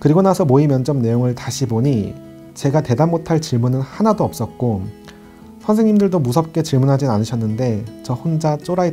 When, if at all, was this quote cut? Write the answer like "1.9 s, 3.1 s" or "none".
3.9 s